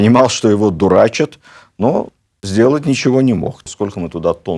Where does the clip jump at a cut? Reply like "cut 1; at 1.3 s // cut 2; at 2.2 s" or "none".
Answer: cut 1; at 3.6 s